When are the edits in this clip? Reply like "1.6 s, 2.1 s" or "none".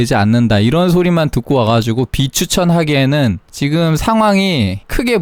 none